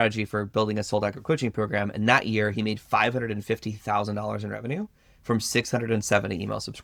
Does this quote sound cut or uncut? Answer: uncut